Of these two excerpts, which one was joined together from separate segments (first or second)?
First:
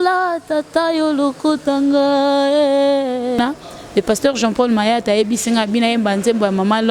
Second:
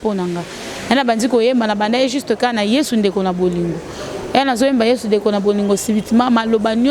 first